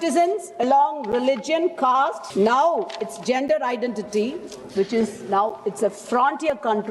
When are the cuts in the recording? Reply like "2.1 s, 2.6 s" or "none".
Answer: 2.2 s